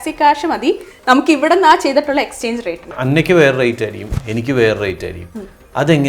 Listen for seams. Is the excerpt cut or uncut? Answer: cut